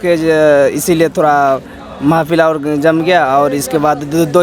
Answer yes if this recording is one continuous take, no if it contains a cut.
yes